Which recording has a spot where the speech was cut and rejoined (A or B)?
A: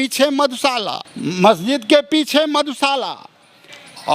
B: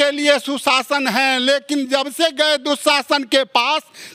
A